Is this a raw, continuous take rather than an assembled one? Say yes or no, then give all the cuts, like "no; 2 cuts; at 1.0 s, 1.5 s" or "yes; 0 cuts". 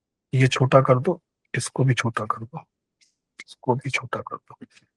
yes; 0 cuts